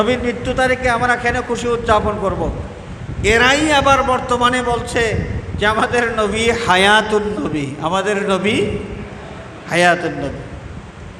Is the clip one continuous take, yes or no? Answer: yes